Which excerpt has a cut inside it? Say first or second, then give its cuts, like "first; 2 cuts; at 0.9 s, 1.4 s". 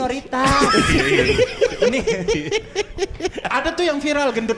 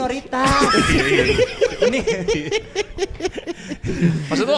first; 1 cut; at 3.4 s